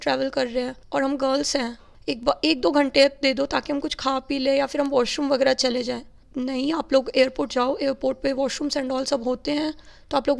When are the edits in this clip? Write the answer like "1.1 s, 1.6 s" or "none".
1.9 s, 6.2 s